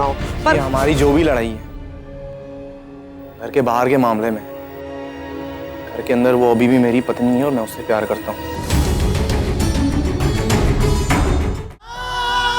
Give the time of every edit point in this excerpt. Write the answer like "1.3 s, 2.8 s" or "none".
11.5 s